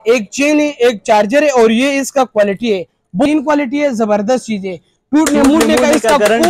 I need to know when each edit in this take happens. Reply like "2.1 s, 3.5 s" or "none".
3.3 s